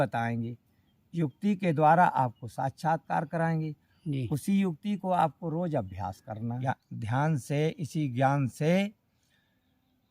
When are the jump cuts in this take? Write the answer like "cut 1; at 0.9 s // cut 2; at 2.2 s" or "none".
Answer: cut 1; at 7.2 s